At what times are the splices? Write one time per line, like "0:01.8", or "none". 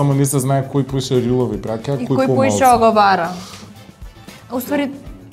none